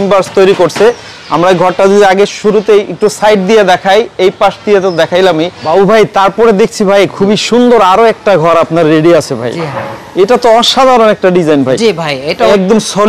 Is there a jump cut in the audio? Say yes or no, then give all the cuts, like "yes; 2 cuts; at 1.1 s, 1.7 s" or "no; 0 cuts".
yes; 2 cuts; at 5.6 s, 12.4 s